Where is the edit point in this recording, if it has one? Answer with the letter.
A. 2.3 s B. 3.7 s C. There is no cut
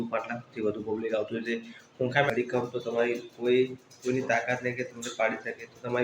A